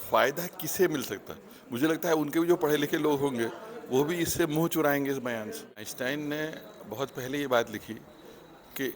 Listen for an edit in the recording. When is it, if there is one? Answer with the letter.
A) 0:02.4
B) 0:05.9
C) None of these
B